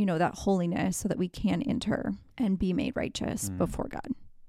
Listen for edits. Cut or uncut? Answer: cut